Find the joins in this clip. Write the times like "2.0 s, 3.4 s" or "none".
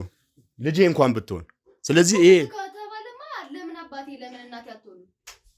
none